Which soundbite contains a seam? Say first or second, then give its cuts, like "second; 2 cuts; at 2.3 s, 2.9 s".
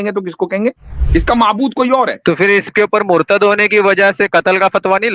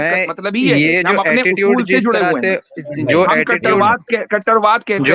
first; 1 cut; at 0.9 s